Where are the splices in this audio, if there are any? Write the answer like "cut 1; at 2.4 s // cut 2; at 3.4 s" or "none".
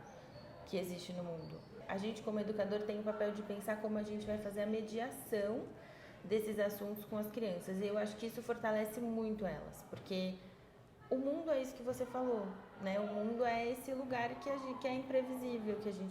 cut 1; at 1.8 s